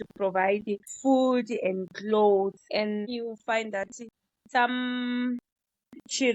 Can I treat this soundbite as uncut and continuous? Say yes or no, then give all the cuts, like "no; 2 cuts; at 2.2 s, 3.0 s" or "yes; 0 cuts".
no; 2 cuts; at 0.9 s, 3.1 s